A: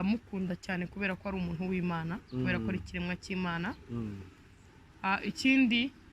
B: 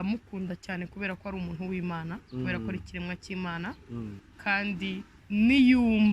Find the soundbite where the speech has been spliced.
B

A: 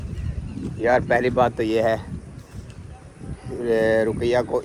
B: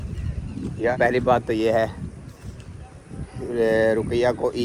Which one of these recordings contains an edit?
B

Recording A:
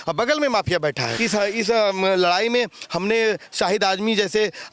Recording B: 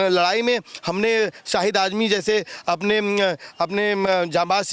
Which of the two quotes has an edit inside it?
A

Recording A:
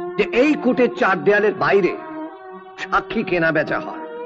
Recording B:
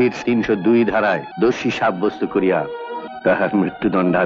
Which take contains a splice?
B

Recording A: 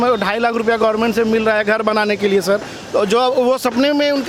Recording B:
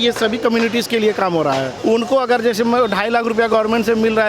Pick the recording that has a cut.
B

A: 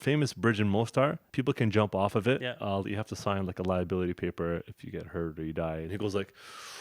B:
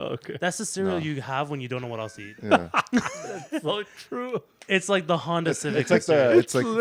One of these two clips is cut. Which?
A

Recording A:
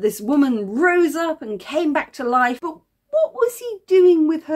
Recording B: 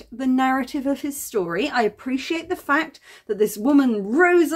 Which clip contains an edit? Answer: A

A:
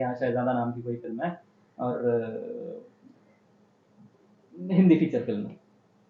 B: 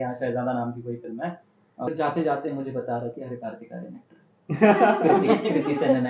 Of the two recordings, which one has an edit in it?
B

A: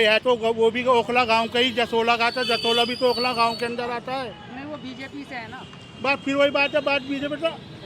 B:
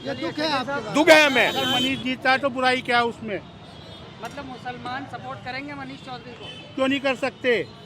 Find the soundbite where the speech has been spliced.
B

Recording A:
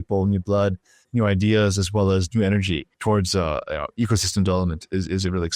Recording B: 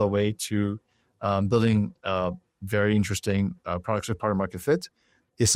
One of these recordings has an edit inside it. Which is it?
A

